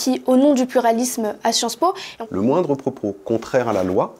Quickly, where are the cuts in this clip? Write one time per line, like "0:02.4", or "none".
0:02.1